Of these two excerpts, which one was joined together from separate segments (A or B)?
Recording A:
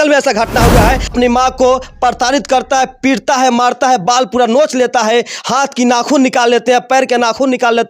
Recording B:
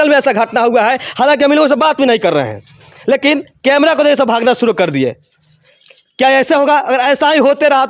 A